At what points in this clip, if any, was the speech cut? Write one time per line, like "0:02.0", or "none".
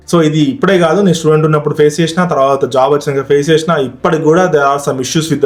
none